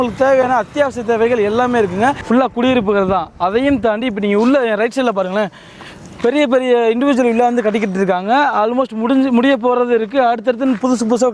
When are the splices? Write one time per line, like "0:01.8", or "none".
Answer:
0:02.2